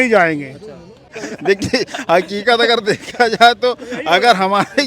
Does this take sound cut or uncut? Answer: cut